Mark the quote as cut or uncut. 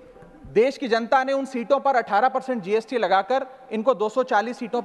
uncut